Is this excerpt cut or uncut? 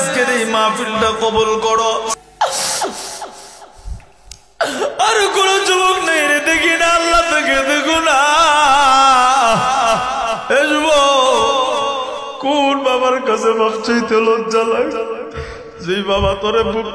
cut